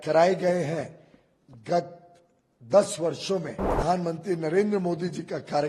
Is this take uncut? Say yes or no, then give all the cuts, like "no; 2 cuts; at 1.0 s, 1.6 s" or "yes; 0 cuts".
no; 1 cut; at 3.7 s